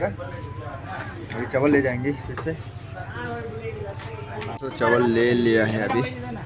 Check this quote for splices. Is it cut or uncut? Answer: cut